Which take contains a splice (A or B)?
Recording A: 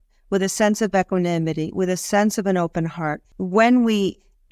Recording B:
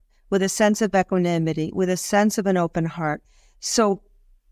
A